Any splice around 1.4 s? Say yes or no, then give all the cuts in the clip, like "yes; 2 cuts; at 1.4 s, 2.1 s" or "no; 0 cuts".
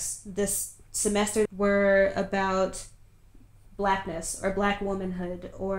yes; 1 cut; at 1.4 s